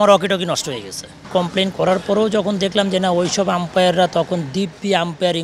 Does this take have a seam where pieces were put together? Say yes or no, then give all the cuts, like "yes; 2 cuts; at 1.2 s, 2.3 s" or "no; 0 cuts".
yes; 1 cut; at 1.3 s